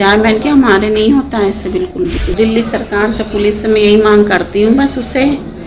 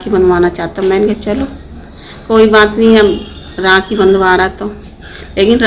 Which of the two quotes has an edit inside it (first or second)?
first